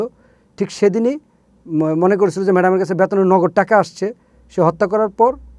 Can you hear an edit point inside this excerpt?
no; 0 cuts

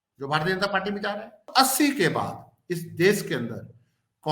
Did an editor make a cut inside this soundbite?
yes; 1 cut; at 1.5 s

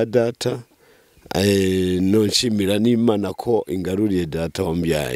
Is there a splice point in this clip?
no; 0 cuts

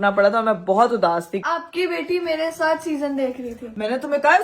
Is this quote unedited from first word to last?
no; 1 cut; at 1.4 s

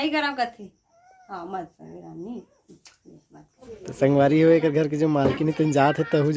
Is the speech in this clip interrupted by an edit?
yes; 1 cut; at 3.7 s

